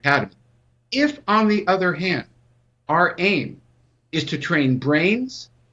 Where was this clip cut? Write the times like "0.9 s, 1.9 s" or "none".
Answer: none